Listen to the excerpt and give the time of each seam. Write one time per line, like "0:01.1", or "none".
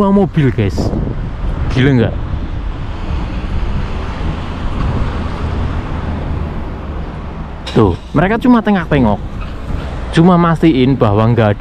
none